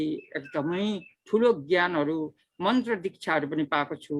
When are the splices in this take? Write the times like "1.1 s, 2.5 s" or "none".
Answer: none